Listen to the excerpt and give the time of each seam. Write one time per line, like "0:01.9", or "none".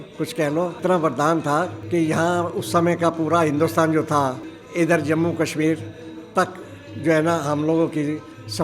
0:00.8
0:01.8
0:04.5

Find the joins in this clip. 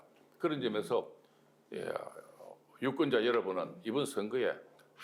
none

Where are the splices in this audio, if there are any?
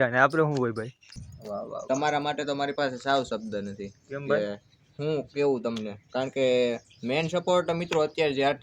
0:01.0

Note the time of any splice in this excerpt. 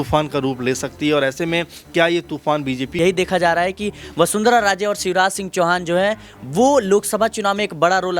0:02.9

